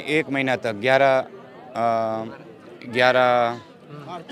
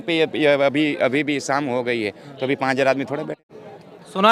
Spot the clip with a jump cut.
second; 1 cut; at 3.3 s

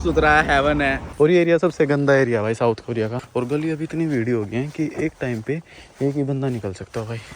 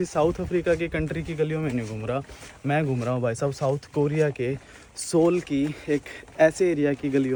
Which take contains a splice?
first; 2 cuts; at 1.0 s, 3.2 s

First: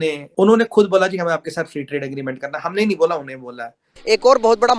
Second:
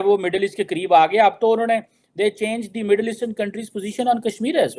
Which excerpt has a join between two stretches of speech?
first; 1 cut; at 3.9 s

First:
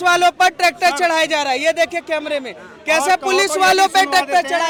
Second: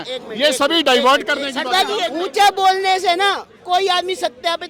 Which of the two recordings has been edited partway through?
second; 1 cut; at 2.1 s

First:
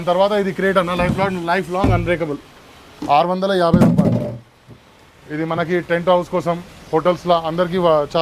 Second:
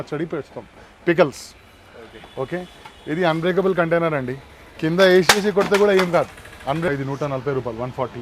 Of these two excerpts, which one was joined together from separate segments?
second; 1 cut; at 7.0 s

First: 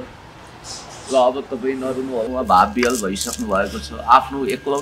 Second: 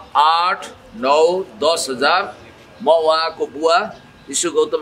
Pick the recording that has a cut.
first; 1 cut; at 2.3 s

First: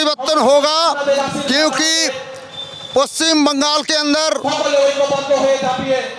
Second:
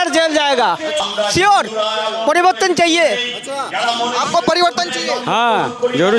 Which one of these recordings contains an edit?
second; 1 cut; at 1.0 s

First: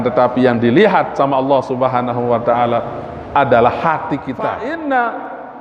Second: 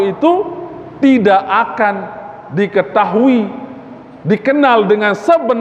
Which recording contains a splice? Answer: first; 1 cut; at 4.6 s

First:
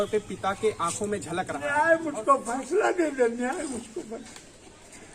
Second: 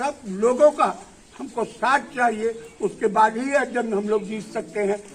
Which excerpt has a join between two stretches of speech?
first; 1 cut; at 1.6 s

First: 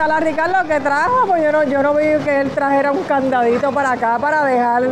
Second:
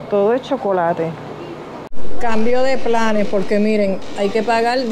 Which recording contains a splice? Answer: second; 1 cut; at 1.7 s

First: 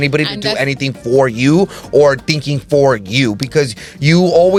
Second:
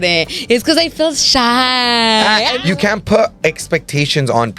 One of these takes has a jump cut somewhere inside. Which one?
second; 1 cut; at 2.6 s

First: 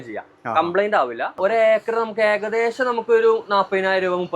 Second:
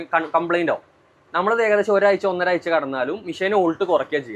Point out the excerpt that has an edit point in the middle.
first; 1 cut; at 1.3 s

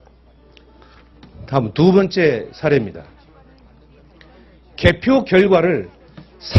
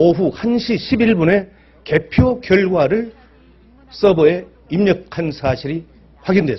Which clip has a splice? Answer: first; 1 cut; at 1.8 s

